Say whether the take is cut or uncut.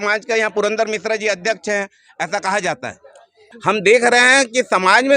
cut